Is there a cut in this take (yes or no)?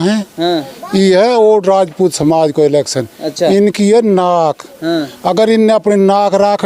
no